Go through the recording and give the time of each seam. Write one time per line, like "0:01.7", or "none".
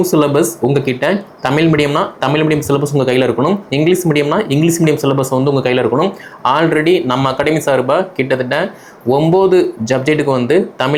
none